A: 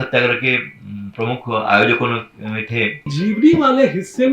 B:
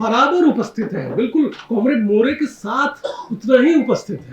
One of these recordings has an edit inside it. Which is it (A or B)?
A